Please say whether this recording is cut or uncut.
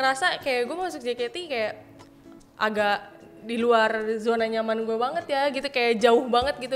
uncut